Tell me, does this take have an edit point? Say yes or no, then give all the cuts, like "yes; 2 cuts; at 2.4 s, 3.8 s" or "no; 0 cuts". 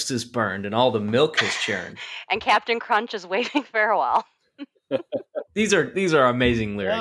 no; 0 cuts